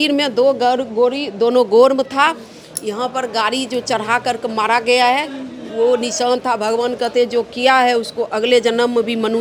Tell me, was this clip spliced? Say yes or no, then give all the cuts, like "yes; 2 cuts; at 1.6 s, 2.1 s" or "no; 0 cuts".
no; 0 cuts